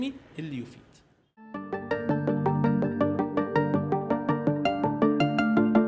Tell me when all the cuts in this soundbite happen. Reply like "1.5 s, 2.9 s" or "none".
1.6 s